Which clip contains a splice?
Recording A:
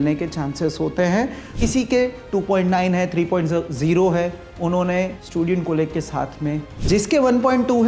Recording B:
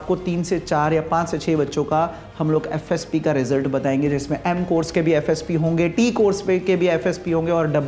A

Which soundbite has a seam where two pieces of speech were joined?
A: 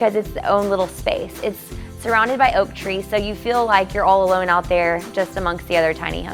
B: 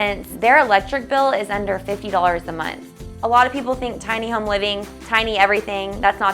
B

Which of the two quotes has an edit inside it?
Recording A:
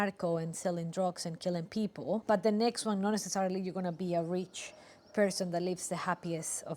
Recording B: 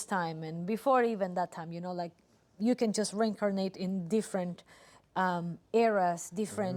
A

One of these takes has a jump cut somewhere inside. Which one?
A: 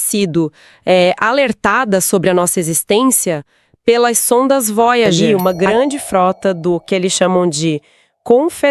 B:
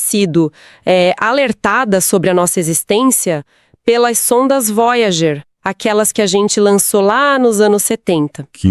A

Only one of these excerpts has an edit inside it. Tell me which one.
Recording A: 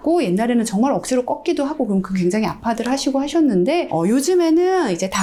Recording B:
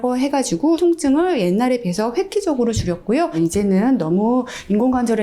B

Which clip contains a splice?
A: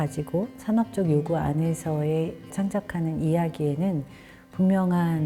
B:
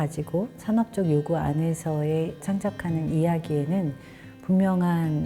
B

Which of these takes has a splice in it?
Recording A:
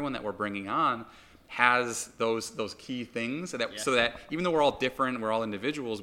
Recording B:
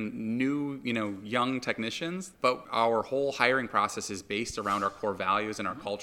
B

